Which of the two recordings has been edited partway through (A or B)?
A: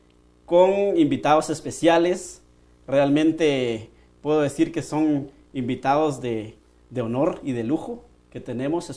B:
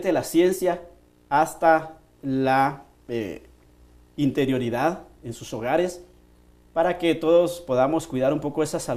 B